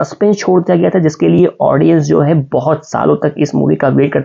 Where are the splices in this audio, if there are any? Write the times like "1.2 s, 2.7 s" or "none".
none